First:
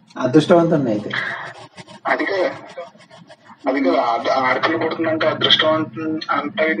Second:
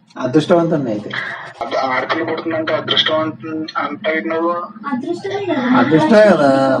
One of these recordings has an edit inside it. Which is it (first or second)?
second